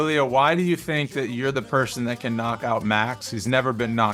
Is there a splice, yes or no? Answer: no